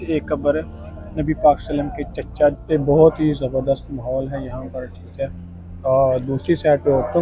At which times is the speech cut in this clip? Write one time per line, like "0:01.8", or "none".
0:02.6